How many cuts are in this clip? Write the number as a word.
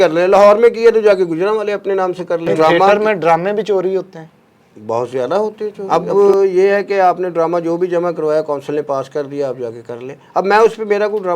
two